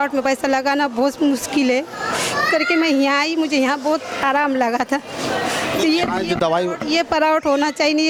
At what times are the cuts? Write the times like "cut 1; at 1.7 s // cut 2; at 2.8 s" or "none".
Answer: none